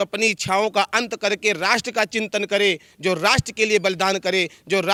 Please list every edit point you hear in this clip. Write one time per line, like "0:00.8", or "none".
none